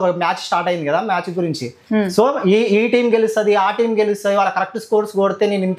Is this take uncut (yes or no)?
yes